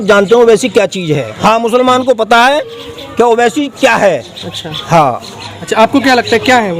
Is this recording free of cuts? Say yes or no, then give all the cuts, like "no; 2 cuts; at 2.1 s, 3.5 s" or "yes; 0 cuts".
no; 1 cut; at 1.3 s